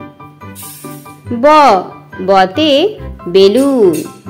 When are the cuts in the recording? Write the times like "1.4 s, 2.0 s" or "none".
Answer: 0.9 s